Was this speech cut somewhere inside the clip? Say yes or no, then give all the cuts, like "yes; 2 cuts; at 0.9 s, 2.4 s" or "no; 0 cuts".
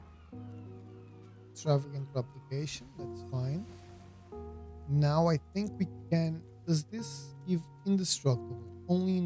no; 0 cuts